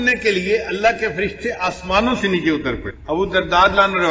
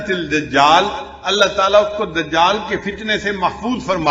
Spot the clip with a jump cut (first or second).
first